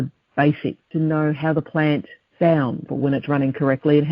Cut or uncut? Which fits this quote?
cut